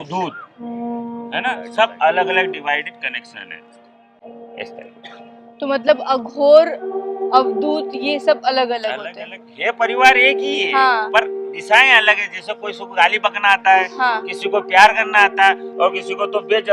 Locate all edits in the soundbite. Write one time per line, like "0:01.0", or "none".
none